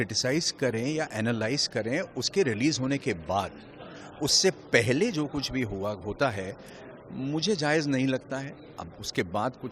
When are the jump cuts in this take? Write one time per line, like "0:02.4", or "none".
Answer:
none